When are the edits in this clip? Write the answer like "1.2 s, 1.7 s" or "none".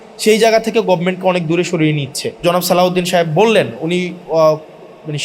2.4 s